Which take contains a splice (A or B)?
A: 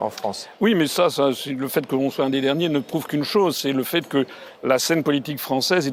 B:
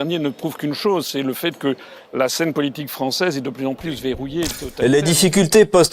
B